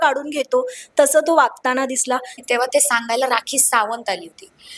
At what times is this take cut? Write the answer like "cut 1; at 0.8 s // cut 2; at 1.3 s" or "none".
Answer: cut 1; at 2.4 s